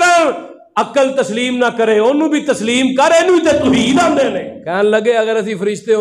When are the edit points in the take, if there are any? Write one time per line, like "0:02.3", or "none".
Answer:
0:04.5